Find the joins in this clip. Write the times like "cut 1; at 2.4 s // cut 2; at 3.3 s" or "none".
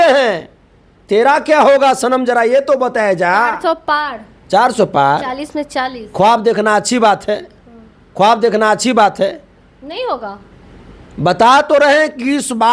none